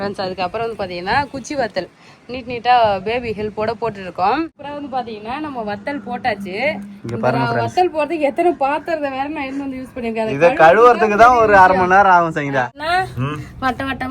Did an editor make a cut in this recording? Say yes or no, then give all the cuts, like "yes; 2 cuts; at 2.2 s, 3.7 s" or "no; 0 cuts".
yes; 2 cuts; at 4.7 s, 12.8 s